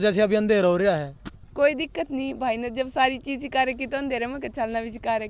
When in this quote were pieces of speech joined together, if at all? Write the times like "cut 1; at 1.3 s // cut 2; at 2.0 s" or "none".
none